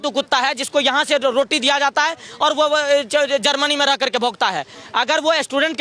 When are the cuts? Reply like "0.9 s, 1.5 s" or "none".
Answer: none